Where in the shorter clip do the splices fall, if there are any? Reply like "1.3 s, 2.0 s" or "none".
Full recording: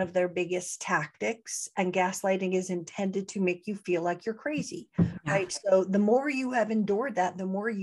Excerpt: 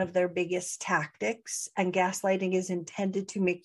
none